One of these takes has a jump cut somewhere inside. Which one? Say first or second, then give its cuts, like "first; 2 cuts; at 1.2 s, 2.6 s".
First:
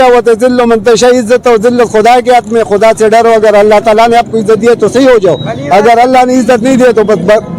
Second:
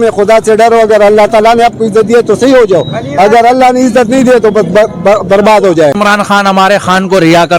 second; 1 cut; at 6.0 s